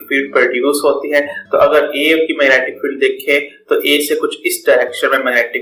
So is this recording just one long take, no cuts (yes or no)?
yes